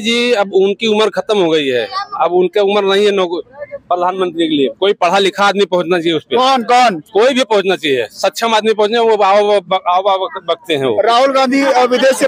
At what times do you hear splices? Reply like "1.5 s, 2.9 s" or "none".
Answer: none